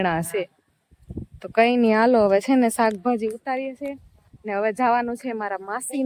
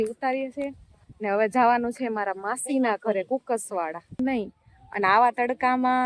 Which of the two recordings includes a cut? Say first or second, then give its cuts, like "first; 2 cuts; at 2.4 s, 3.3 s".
second; 1 cut; at 4.2 s